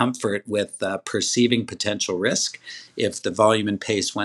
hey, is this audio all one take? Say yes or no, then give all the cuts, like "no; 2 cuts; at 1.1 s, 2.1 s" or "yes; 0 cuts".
yes; 0 cuts